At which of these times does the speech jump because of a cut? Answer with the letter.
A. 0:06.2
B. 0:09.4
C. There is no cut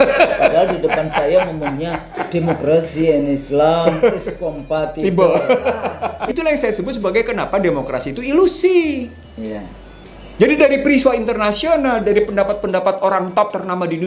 A